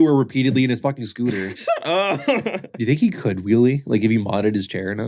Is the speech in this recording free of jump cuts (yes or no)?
no